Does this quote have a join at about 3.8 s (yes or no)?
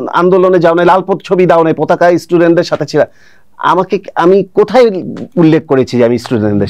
no